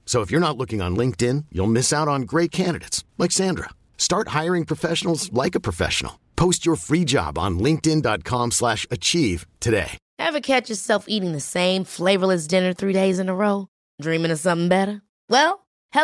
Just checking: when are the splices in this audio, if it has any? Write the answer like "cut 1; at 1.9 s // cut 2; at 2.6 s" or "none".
cut 1; at 10.0 s